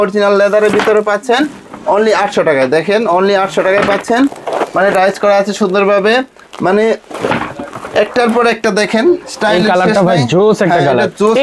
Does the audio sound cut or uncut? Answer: uncut